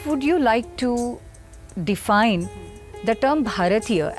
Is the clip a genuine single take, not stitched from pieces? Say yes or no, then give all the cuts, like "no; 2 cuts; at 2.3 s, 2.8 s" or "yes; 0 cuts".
yes; 0 cuts